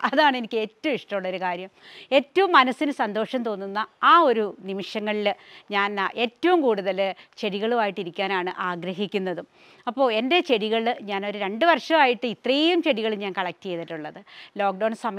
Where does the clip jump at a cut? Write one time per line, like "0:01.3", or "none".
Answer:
none